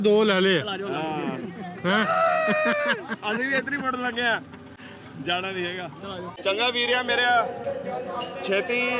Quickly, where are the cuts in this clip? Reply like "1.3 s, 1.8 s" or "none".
none